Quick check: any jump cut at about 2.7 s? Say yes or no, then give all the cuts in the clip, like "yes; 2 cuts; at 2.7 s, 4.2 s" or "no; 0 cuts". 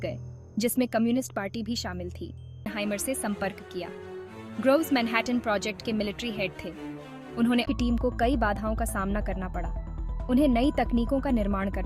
yes; 2 cuts; at 2.7 s, 7.6 s